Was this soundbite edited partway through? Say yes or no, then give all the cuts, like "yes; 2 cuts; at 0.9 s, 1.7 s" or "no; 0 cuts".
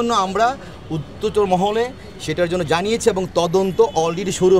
no; 0 cuts